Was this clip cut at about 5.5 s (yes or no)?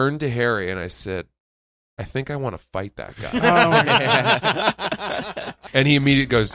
yes